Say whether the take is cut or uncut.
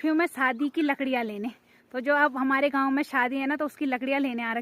uncut